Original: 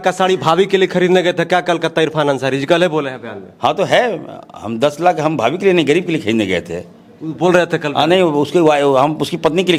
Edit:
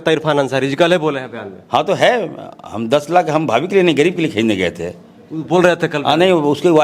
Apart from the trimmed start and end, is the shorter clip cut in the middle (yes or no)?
no